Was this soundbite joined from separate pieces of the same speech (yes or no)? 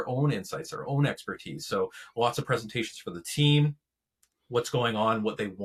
no